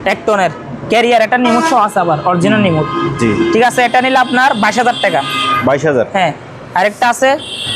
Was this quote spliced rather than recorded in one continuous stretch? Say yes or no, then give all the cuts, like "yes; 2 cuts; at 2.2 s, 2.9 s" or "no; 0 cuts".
no; 0 cuts